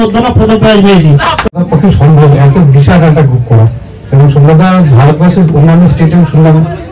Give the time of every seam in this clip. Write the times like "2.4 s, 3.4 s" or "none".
1.5 s

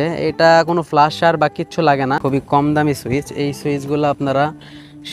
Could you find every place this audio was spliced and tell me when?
2.2 s

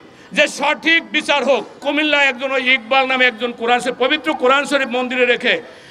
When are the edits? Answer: 1.8 s

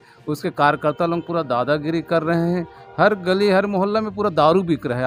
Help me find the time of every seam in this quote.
none

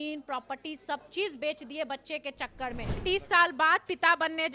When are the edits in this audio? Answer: 3.0 s

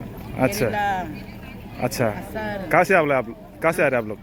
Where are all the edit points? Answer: none

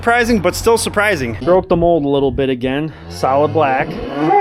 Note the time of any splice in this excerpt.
1.4 s

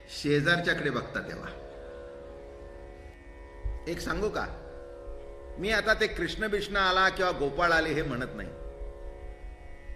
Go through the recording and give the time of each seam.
3.2 s

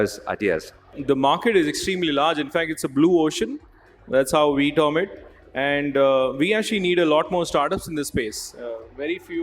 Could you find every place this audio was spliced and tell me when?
0.9 s

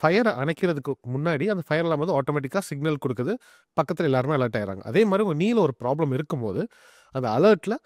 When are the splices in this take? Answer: none

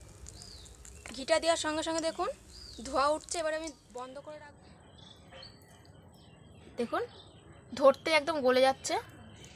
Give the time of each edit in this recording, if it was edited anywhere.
4.2 s

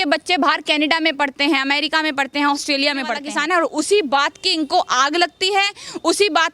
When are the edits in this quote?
3.2 s

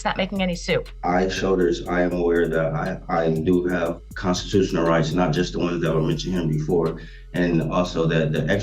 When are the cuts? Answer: 0.9 s

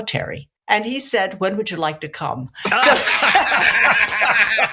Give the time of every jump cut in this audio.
none

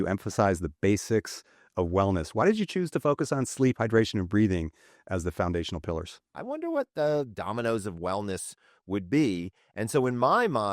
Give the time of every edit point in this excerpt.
6.3 s

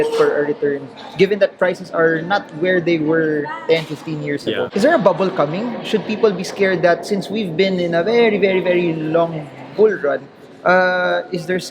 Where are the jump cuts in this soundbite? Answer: 4.7 s

